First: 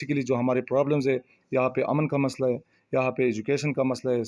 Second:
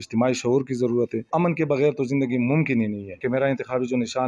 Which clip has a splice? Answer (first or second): second